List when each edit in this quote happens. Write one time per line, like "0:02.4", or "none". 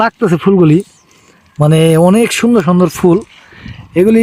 none